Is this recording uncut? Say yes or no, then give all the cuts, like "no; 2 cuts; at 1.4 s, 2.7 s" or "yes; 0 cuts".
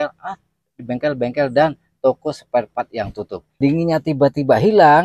no; 1 cut; at 3.6 s